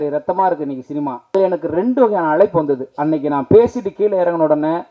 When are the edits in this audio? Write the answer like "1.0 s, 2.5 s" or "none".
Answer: 1.3 s